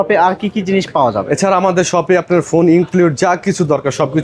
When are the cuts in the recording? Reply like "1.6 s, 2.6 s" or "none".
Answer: none